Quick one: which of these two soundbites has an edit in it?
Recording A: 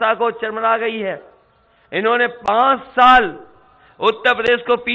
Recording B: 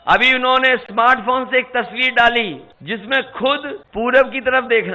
B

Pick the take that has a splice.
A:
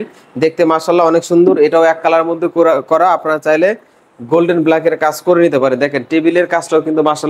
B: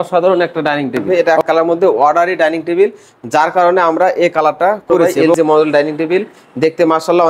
B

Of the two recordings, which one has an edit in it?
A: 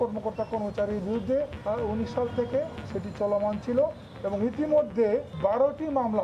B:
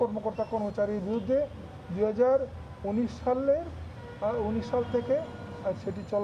A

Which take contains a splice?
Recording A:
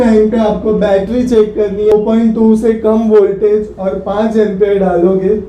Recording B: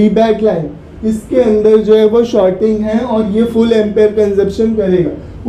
A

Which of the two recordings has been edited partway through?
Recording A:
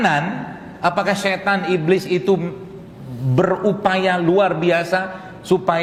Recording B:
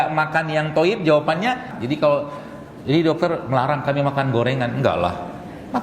B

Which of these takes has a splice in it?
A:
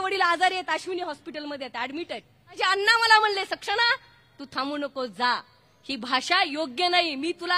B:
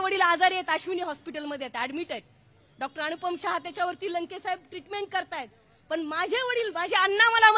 A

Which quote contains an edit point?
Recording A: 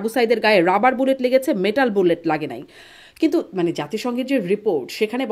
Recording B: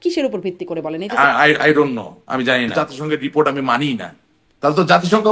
B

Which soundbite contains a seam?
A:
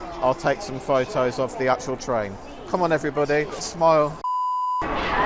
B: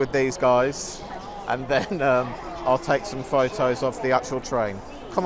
A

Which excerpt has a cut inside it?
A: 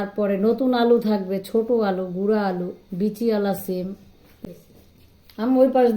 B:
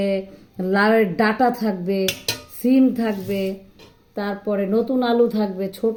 A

